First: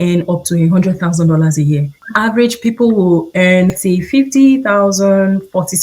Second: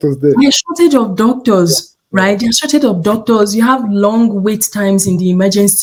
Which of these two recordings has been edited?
first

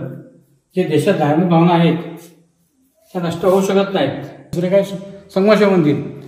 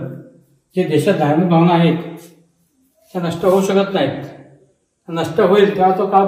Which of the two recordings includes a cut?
first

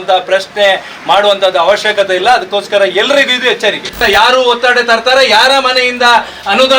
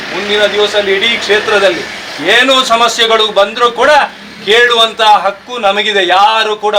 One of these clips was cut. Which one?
first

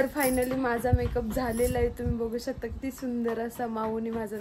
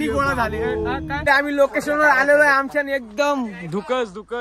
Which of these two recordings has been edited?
second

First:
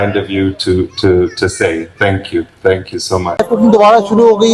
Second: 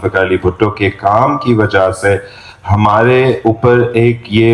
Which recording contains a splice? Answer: first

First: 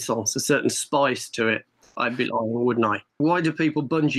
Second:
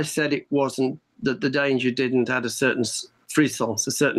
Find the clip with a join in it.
first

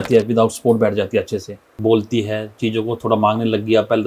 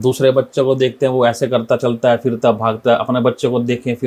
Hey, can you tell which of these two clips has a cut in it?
first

